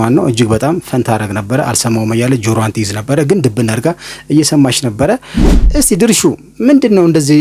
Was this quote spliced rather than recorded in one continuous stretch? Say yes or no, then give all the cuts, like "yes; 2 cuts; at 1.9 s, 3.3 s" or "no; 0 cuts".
yes; 1 cut; at 5.6 s